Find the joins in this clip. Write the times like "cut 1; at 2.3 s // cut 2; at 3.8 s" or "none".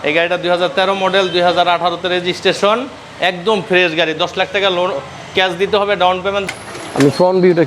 cut 1; at 6.4 s